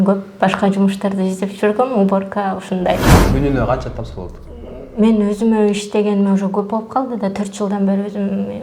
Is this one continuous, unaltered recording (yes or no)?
no